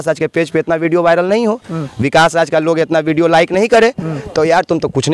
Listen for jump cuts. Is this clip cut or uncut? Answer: uncut